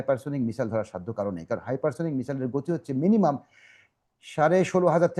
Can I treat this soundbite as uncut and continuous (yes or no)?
yes